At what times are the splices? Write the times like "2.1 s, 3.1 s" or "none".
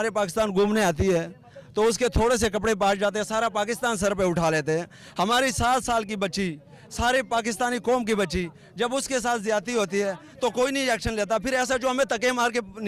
none

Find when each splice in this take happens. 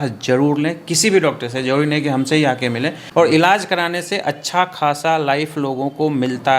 3.0 s

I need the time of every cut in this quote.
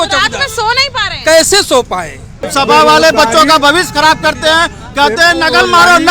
2.5 s

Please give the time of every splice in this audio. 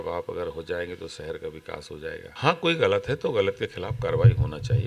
2.3 s

